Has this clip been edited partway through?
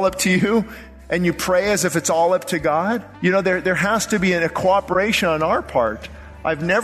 yes; 1 cut; at 3.1 s

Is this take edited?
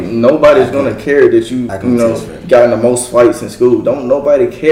no; 0 cuts

